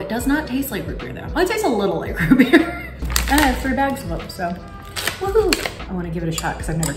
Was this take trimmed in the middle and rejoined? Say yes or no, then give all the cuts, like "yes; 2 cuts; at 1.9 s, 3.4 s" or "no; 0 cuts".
yes; 2 cuts; at 3.0 s, 5.8 s